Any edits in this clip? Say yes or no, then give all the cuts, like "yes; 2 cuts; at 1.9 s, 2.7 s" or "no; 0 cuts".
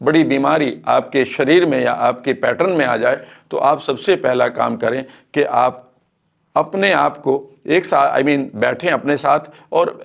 no; 0 cuts